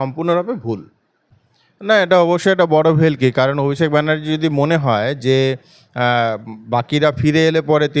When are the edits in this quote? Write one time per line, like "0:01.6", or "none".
0:01.3